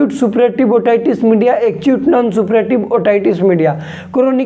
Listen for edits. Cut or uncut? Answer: uncut